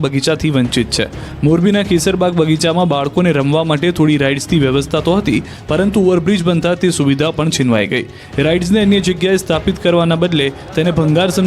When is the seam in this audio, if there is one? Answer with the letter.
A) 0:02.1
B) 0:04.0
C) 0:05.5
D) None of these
C